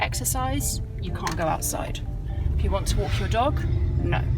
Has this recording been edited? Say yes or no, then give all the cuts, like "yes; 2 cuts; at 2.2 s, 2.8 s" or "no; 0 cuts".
no; 0 cuts